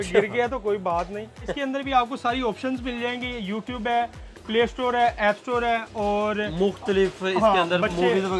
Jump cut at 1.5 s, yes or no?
yes